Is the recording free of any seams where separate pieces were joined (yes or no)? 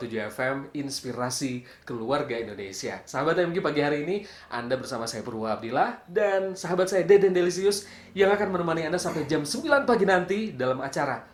yes